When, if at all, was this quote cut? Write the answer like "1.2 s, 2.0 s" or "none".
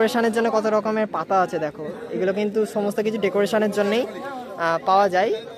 none